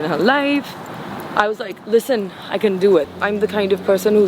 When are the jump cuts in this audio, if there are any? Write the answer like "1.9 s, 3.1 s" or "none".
3.1 s